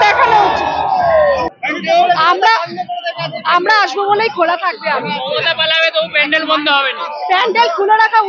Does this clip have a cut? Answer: yes; 1 cut; at 1.5 s

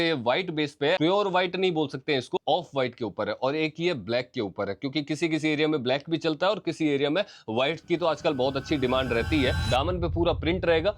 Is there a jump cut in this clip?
yes; 2 cuts; at 1.0 s, 9.6 s

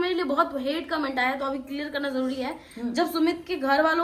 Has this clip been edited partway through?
no; 0 cuts

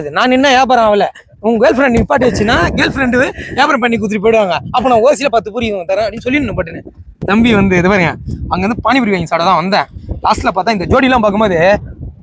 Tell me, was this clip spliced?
yes; 1 cut; at 7.1 s

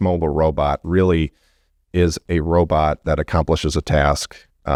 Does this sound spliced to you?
no; 0 cuts

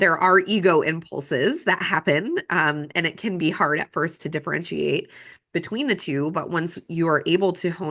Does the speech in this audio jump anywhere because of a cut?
no; 0 cuts

